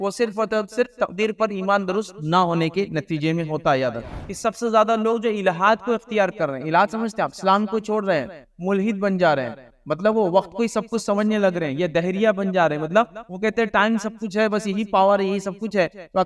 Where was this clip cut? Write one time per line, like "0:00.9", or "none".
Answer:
0:04.1